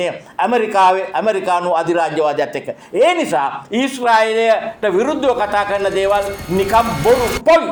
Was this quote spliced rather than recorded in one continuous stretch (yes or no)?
no